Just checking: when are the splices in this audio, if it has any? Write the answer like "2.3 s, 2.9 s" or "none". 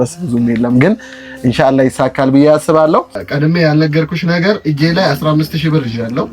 3.2 s